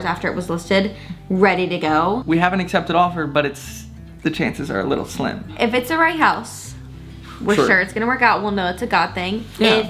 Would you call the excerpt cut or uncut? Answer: cut